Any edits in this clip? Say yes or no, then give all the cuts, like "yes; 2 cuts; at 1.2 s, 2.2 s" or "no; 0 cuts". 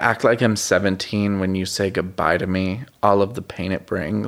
no; 0 cuts